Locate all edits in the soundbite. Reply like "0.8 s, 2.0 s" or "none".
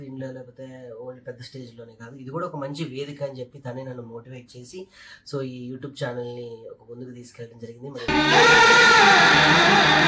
none